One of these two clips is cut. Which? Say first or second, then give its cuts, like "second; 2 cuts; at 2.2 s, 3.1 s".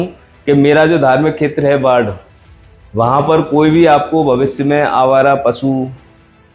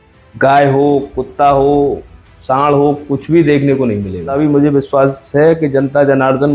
second; 1 cut; at 4.3 s